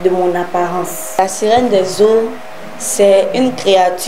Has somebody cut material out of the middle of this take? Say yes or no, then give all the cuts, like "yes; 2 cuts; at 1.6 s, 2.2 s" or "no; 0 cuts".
yes; 1 cut; at 1.2 s